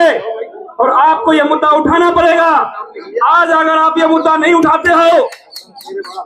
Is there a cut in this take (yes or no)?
no